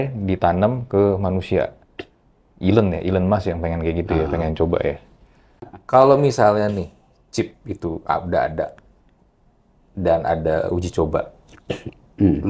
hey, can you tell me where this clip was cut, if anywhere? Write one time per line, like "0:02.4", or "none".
0:05.8